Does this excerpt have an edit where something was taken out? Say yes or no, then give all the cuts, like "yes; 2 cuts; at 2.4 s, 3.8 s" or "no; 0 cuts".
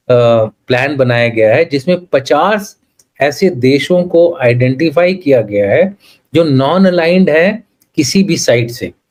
no; 0 cuts